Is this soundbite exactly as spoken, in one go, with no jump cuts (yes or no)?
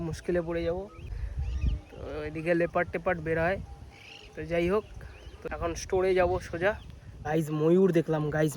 yes